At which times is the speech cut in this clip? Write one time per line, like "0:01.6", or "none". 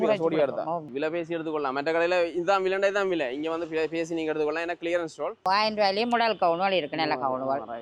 0:00.9
0:05.5